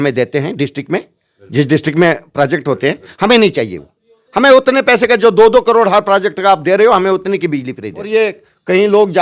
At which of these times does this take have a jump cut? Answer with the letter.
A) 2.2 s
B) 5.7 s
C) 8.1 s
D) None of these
C